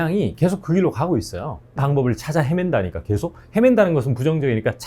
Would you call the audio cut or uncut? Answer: cut